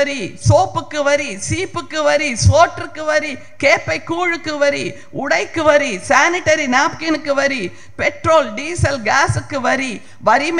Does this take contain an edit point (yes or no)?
no